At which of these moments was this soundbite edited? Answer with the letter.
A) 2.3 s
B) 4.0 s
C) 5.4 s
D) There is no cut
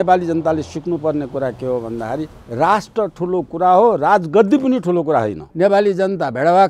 C